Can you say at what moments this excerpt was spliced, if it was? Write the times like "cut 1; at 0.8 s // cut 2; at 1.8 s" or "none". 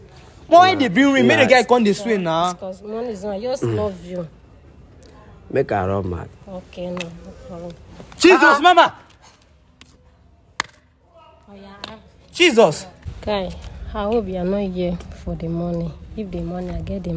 cut 1; at 13.1 s